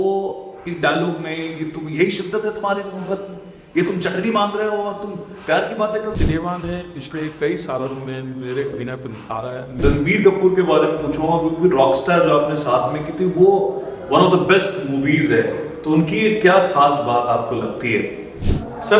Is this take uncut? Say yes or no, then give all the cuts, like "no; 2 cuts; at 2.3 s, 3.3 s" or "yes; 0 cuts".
no; 2 cuts; at 6.2 s, 9.7 s